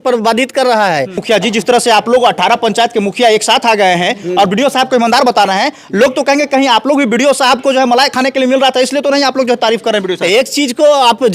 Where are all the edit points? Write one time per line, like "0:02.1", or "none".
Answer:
0:01.2